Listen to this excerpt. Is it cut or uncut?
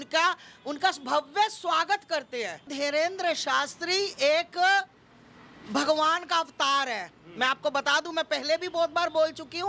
cut